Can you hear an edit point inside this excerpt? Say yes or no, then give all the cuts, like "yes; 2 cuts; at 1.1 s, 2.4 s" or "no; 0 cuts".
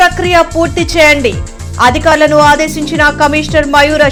no; 0 cuts